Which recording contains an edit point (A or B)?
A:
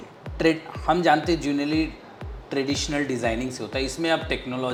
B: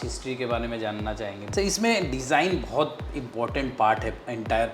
B